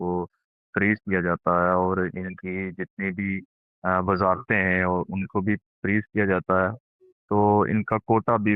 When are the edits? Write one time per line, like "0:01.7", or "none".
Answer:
none